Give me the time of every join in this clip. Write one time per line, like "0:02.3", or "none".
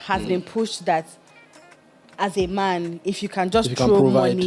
none